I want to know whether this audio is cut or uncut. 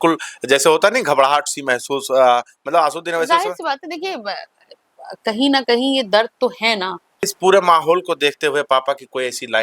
cut